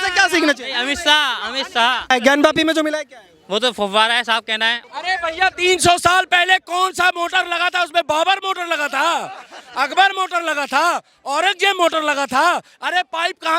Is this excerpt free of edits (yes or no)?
no